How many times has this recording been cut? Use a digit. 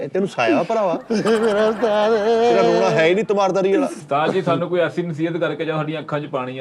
1